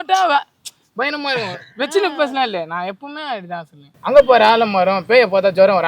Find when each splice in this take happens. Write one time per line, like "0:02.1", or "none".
0:03.9